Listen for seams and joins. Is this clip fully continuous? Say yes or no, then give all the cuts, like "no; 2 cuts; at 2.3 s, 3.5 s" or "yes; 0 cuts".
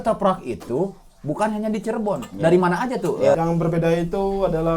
no; 1 cut; at 3.3 s